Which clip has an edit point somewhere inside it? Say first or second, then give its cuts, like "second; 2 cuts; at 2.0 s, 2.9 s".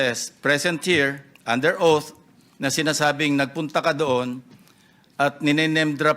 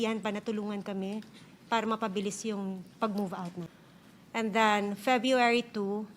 second; 1 cut; at 3.6 s